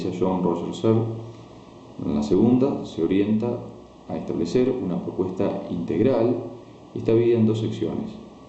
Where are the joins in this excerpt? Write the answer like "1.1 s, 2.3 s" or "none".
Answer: 4.8 s